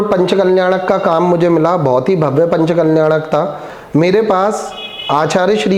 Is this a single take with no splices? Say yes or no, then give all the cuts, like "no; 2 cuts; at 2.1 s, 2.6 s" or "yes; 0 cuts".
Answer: no; 1 cut; at 3.7 s